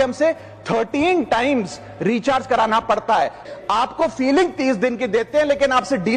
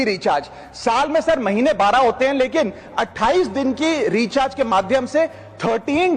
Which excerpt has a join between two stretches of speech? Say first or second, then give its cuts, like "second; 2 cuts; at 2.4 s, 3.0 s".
first; 1 cut; at 3.4 s